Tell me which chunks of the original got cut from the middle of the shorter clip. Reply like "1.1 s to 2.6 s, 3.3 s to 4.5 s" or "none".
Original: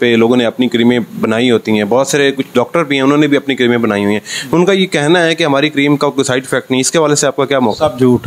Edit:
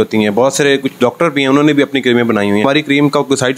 4.2 s to 5.5 s

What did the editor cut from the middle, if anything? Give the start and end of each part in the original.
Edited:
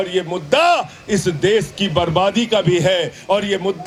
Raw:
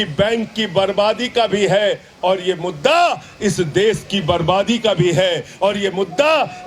none

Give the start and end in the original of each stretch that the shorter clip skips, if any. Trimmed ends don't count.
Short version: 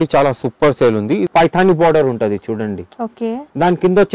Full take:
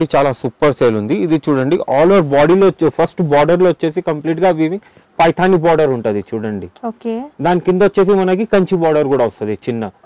1.2 s to 5.1 s

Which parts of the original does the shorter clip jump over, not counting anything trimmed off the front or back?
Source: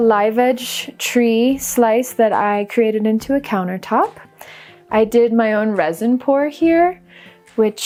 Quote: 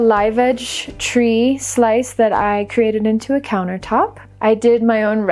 4.2 s to 4.7 s

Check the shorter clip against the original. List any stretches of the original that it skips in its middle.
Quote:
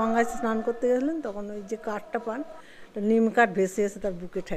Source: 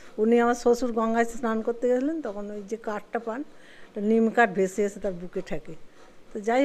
none

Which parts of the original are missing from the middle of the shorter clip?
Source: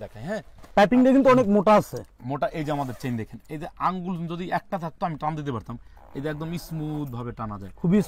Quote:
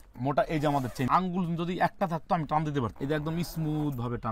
3.1 s to 3.8 s, 5.6 s to 6.1 s

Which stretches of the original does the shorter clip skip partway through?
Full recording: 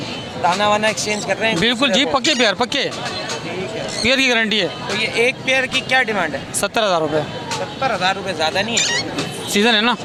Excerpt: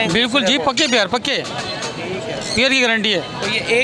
none

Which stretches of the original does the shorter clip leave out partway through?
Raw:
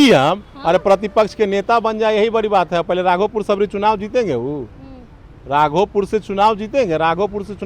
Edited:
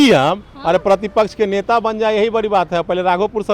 none

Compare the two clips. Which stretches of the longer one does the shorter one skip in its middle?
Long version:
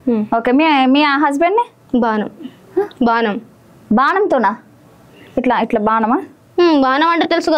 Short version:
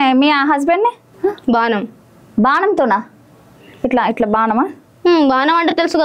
1.8 s to 2.6 s

